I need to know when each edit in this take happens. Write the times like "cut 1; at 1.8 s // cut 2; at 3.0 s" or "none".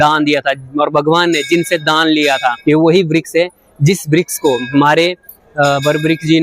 cut 1; at 2.6 s